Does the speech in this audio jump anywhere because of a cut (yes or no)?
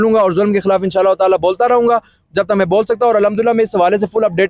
no